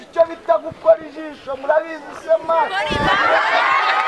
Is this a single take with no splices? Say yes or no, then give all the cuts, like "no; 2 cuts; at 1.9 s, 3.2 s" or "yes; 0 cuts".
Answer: yes; 0 cuts